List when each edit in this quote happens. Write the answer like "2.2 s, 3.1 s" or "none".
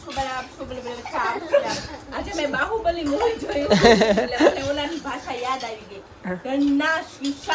none